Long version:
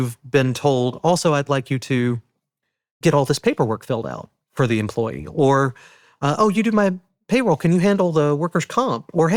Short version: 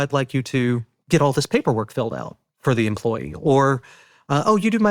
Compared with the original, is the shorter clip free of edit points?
no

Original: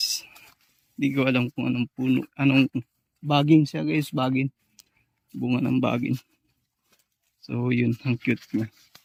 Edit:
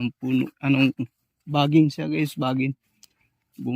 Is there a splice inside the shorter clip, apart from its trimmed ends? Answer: no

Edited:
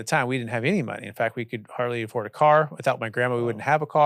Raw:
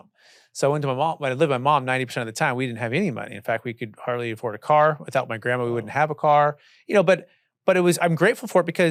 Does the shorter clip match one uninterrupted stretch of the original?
yes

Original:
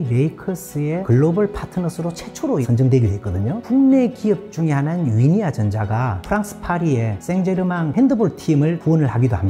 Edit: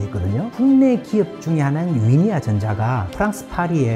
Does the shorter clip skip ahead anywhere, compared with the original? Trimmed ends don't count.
no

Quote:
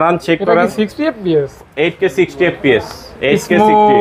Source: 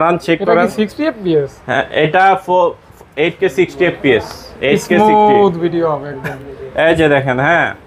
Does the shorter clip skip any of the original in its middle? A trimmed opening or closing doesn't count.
yes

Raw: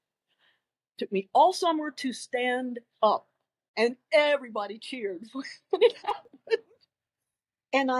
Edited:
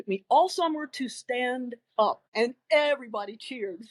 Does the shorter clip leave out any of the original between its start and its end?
yes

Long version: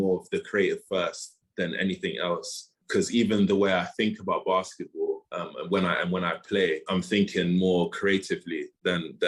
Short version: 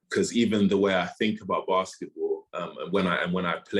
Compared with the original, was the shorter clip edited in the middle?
no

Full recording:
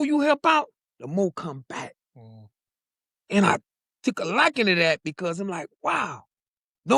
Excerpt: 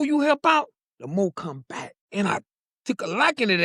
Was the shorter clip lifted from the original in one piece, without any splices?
no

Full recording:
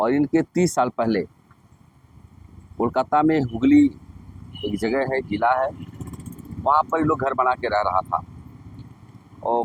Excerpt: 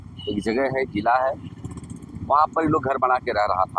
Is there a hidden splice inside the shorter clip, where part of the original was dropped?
no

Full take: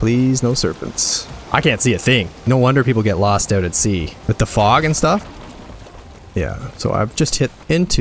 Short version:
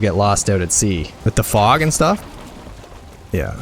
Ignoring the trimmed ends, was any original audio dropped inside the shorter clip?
no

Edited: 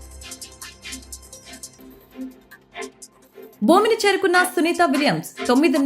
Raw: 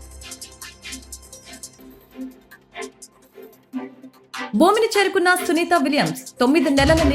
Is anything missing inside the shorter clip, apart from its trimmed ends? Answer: yes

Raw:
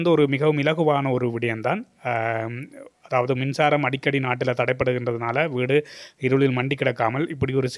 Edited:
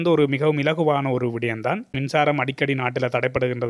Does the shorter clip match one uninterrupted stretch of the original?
no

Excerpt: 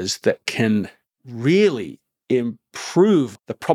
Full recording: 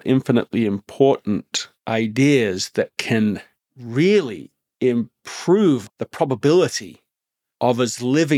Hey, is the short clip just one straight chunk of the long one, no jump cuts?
yes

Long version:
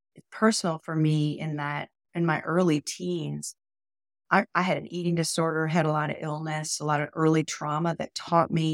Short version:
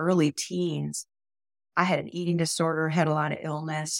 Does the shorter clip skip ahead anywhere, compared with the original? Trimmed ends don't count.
yes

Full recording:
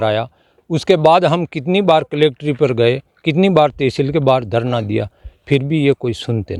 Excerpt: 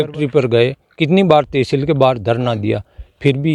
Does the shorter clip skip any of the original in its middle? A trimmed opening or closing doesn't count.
no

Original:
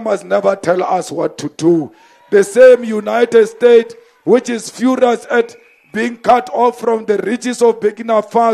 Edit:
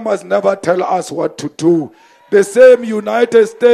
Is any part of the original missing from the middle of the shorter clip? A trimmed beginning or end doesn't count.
no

